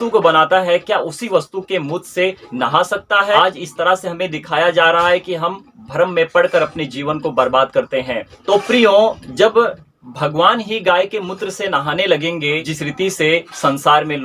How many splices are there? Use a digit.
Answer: 2